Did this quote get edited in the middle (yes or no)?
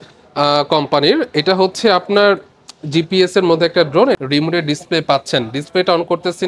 yes